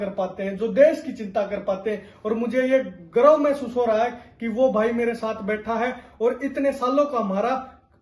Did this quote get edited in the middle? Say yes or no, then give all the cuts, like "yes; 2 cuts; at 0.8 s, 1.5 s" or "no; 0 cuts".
no; 0 cuts